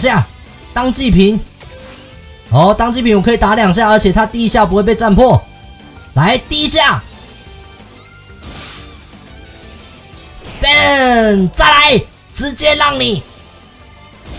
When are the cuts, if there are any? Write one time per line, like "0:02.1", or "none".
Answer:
none